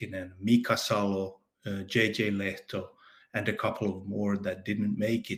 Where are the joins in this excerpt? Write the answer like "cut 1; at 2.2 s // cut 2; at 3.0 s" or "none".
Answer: none